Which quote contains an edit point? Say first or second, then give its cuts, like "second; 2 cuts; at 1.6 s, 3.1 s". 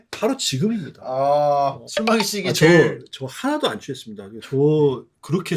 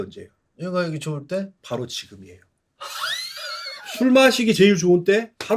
first; 2 cuts; at 1.8 s, 4.3 s